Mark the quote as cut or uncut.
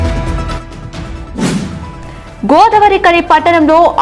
uncut